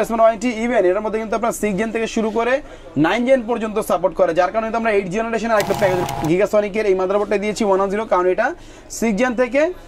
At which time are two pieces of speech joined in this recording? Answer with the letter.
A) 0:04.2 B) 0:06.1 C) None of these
B